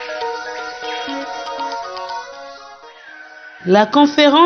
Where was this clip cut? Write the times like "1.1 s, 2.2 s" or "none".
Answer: 3.5 s